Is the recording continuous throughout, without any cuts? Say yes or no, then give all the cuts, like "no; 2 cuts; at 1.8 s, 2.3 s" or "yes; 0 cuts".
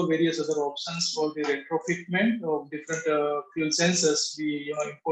yes; 0 cuts